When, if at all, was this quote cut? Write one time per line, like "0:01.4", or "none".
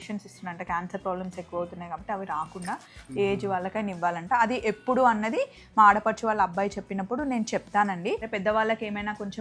0:08.2